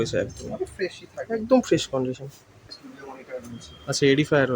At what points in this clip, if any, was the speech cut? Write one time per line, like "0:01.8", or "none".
0:02.8